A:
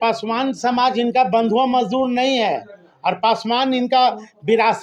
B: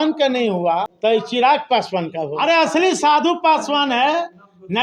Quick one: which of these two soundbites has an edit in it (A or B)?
B